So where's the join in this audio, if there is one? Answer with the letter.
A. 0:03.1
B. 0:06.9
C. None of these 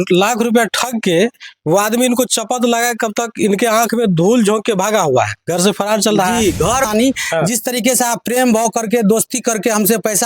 B